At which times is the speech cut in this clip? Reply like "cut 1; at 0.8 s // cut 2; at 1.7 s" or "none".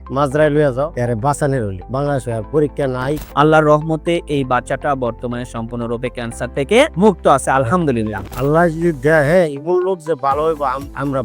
cut 1; at 0.9 s // cut 2; at 3.2 s // cut 3; at 8.3 s

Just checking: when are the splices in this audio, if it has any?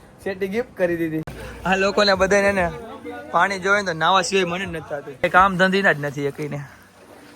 cut 1; at 1.4 s // cut 2; at 5.2 s

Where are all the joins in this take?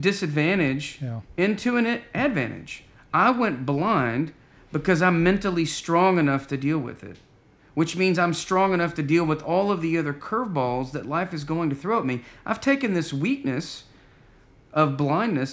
none

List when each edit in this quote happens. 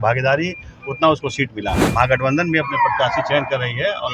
cut 1; at 1.8 s

